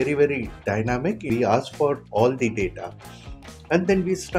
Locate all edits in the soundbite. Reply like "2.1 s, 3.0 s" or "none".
1.2 s